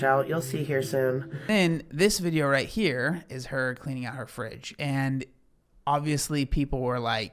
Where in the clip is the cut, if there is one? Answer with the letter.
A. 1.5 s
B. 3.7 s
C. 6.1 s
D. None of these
A